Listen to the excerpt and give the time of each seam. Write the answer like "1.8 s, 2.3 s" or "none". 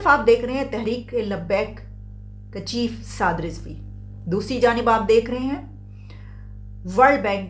none